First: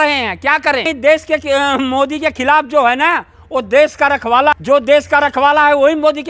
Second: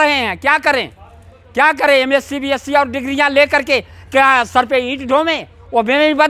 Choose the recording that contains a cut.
first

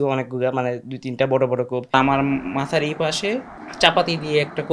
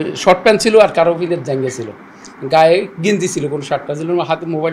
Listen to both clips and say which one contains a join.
first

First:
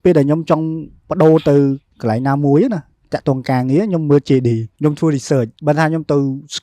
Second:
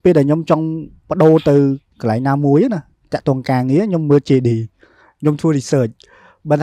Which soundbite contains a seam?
first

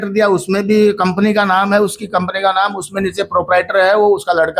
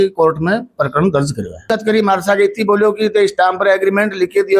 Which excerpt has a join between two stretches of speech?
second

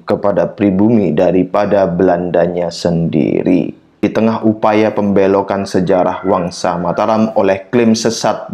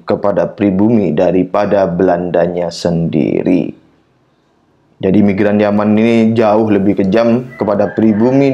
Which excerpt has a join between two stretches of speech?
first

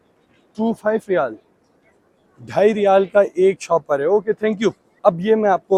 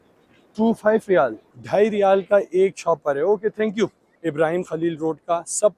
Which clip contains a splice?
second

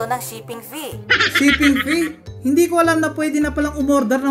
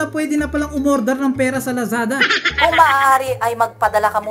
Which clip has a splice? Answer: second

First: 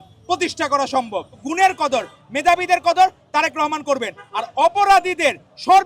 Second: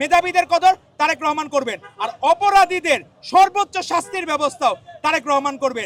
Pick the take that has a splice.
first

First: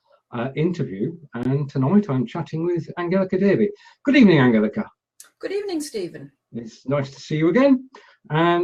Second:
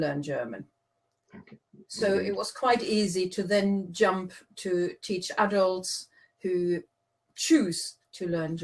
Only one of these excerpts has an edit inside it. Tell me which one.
first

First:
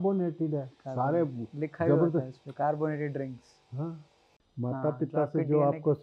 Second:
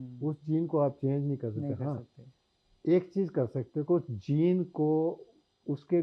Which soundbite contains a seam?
first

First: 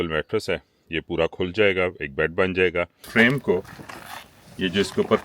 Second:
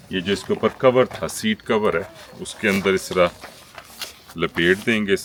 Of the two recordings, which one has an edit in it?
first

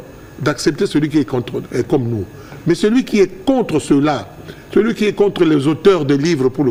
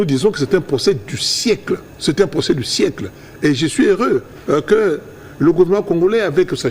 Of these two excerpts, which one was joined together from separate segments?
second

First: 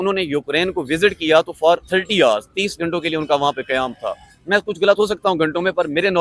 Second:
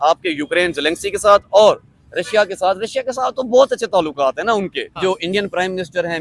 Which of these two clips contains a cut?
second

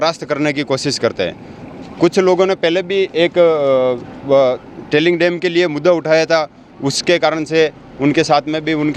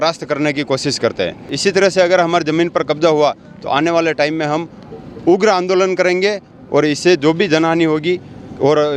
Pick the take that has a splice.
second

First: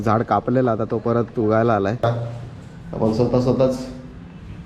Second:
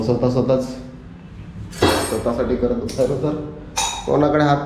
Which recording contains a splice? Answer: first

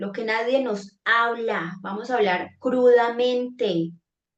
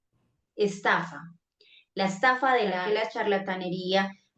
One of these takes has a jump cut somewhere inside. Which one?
second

